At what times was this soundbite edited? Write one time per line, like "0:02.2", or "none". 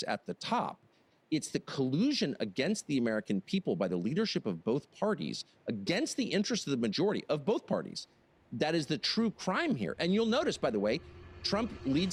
none